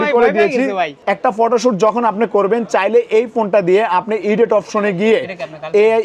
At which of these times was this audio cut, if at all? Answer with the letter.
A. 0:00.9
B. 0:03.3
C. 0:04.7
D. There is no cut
A